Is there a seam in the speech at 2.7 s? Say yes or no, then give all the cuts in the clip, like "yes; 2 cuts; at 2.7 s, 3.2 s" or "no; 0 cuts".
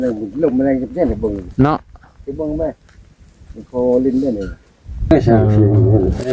no; 1 cut; at 5.1 s